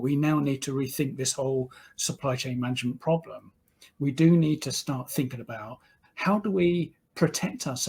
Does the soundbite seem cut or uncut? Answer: uncut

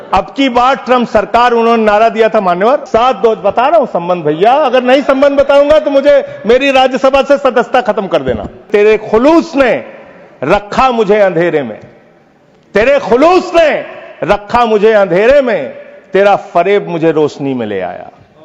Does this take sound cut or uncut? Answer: cut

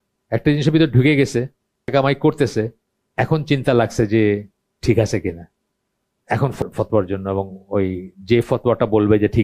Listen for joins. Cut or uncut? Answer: cut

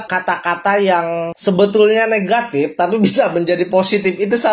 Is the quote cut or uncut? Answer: uncut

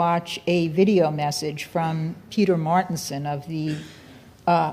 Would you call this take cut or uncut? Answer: cut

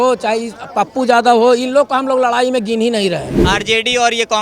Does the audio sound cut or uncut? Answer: cut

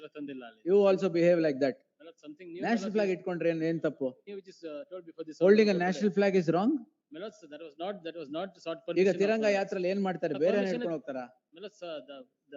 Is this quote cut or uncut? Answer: uncut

